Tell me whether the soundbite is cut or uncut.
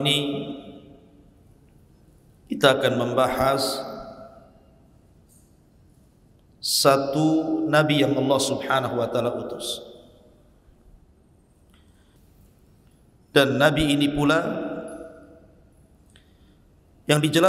cut